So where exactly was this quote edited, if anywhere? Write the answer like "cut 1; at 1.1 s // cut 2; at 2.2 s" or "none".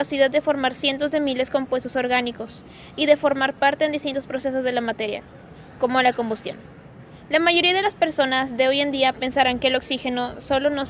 none